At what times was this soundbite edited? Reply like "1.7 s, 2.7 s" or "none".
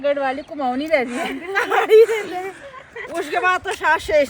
none